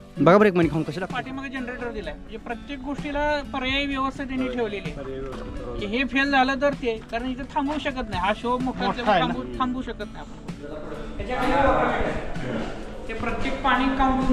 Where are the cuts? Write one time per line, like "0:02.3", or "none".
0:00.9
0:10.9